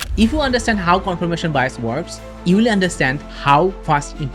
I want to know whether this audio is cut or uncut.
uncut